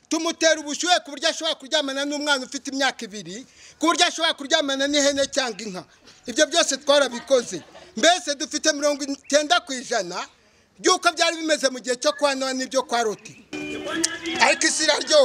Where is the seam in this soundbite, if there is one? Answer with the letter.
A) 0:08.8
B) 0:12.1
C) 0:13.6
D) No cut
C